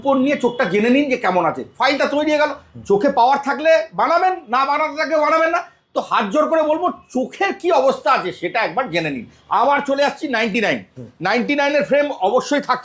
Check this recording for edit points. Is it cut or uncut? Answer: uncut